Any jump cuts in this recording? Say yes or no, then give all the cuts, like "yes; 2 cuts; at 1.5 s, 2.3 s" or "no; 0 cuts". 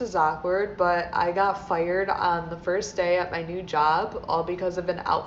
no; 0 cuts